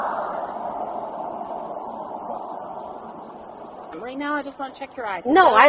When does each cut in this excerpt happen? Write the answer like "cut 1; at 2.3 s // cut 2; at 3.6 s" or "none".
cut 1; at 3.9 s